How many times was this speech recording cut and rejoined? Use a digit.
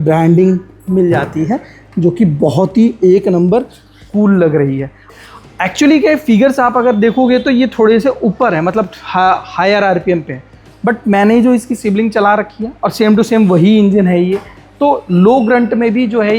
1